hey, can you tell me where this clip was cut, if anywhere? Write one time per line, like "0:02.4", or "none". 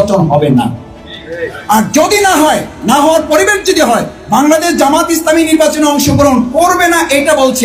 none